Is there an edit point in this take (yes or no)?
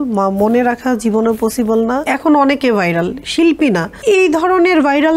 yes